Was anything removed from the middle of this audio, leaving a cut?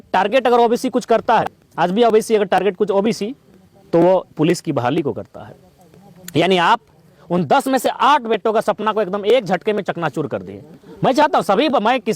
yes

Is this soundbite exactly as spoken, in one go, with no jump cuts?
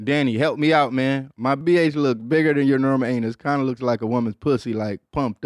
no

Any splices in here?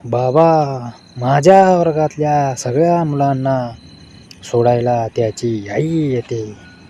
no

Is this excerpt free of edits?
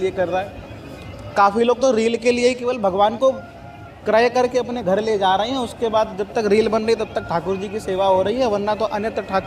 yes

